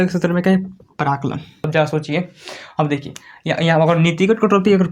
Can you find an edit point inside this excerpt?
yes; 1 cut; at 1.7 s

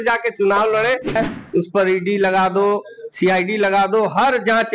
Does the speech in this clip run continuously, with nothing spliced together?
no; 1 cut; at 1.2 s

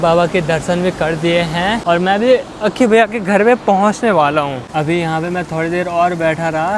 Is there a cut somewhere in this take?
yes; 2 cuts; at 1.8 s, 4.6 s

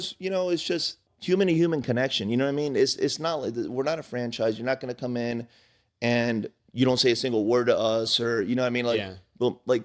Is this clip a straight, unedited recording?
no; 1 cut; at 1.1 s

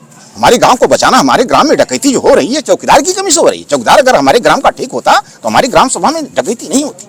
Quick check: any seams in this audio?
no; 0 cuts

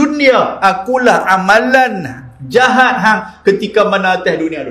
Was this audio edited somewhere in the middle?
no; 0 cuts

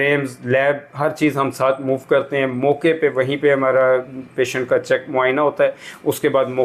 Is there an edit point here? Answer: no; 0 cuts

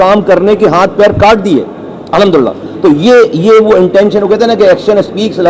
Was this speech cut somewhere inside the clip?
no; 0 cuts

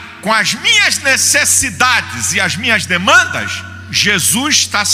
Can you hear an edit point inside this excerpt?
no; 0 cuts

